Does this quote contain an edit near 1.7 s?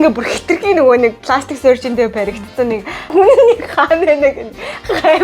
no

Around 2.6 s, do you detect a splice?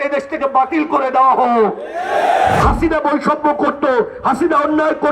yes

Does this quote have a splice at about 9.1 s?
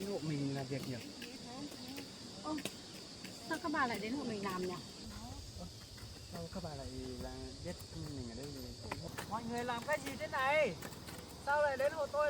yes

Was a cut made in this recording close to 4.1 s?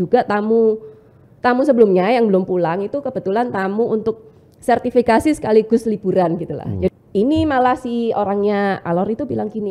no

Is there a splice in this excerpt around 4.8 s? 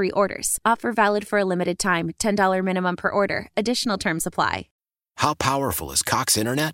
yes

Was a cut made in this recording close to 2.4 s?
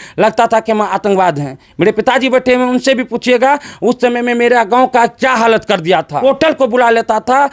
no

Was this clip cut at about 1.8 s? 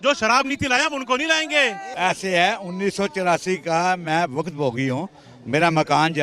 yes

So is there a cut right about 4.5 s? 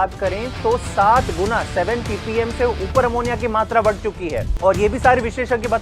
yes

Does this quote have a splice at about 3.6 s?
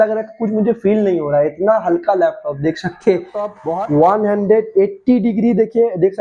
yes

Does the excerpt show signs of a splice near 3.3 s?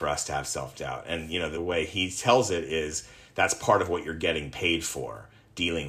no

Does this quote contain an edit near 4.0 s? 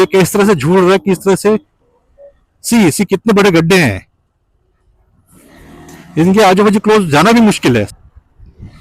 no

